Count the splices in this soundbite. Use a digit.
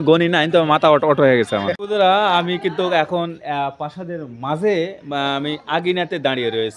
1